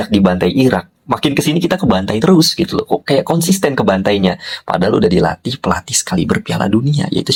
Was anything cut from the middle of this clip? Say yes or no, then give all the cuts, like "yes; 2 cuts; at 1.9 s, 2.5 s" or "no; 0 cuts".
no; 0 cuts